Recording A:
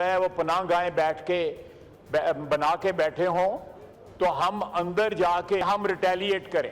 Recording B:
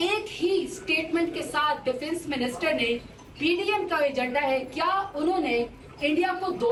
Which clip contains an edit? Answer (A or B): A